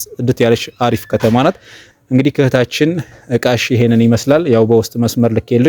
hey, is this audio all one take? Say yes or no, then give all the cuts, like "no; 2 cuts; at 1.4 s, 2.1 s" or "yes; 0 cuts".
yes; 0 cuts